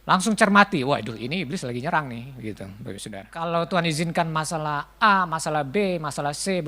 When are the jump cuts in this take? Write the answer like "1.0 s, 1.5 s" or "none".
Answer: 3.2 s